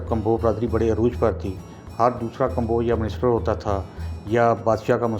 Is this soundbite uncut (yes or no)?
yes